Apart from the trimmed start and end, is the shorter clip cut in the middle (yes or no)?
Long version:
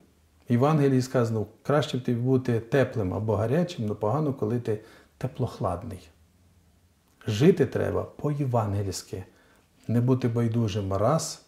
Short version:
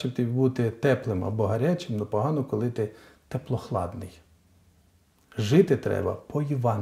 no